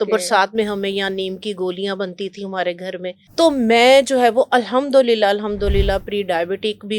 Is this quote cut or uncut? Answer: cut